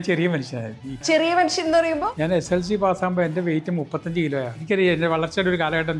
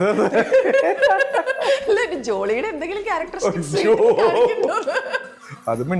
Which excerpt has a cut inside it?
first; 3 cuts; at 1.0 s, 2.1 s, 4.6 s

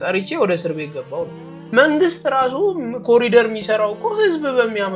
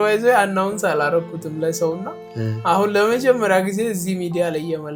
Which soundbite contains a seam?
first; 1 cut; at 1.5 s

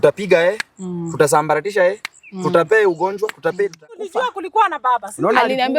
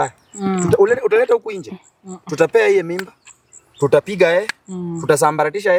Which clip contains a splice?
first; 1 cut; at 4.1 s

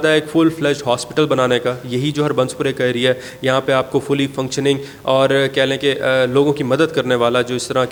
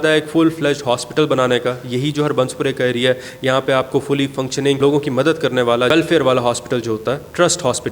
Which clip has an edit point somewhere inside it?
second; 2 cuts; at 4.8 s, 5.9 s

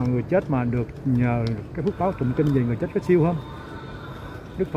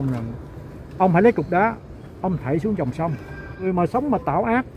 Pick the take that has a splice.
second; 1 cut; at 3.7 s

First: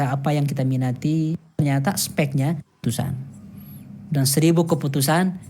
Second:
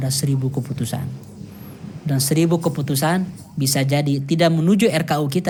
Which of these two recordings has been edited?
first; 2 cuts; at 1.6 s, 2.8 s

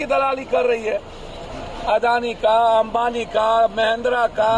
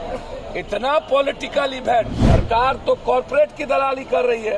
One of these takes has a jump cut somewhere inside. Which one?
second; 1 cut; at 2.2 s

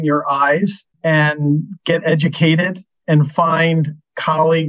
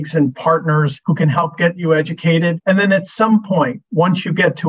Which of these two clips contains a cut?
second; 3 cuts; at 1.0 s, 2.6 s, 3.8 s

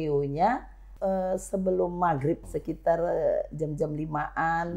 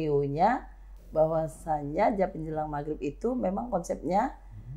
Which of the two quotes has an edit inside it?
first; 2 cuts; at 0.9 s, 2.4 s

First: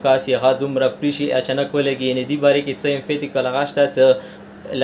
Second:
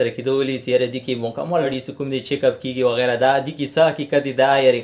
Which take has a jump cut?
second; 1 cut; at 1.7 s

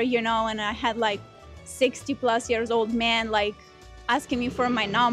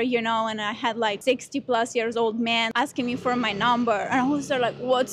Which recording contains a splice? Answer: second; 2 cuts; at 1.2 s, 2.7 s

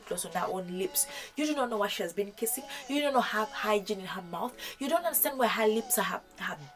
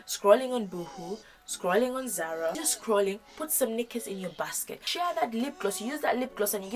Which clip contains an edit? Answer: second; 2 cuts; at 2.7 s, 4.9 s

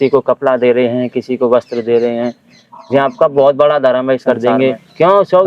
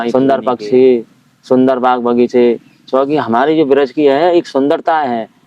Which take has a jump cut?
first; 1 cut; at 4.2 s

